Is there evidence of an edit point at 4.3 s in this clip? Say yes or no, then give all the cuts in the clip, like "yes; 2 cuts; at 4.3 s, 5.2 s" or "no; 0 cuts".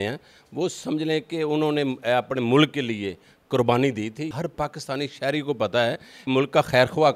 yes; 2 cuts; at 4.3 s, 6.2 s